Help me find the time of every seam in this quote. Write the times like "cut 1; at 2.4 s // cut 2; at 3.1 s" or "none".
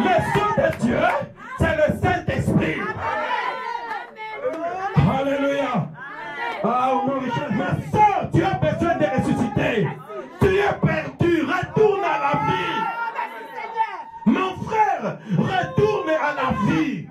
cut 1; at 7.5 s

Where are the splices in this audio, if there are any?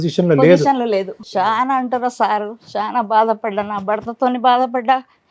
cut 1; at 1.2 s

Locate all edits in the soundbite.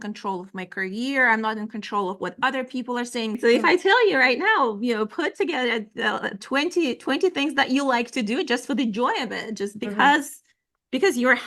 cut 1; at 3.4 s

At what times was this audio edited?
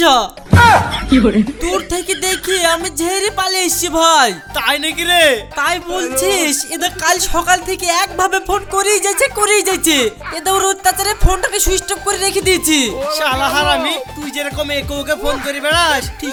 none

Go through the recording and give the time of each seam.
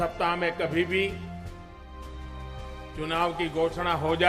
cut 1; at 1.2 s // cut 2; at 3.0 s

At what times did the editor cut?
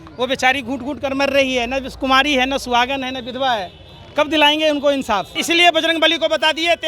cut 1; at 5.4 s

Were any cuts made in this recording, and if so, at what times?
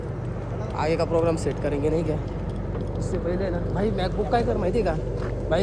none

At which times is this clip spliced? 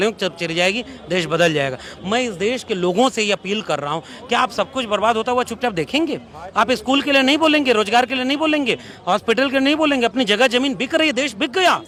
none

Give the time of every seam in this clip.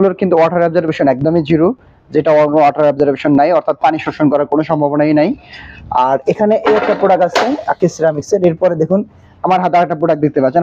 none

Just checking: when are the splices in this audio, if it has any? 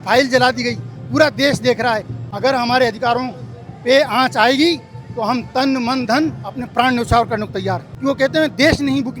cut 1; at 2.2 s // cut 2; at 7.9 s

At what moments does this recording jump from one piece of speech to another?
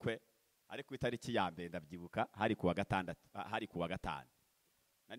none

